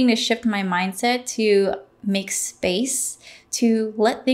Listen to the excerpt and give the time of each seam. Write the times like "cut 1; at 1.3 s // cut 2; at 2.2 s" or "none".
none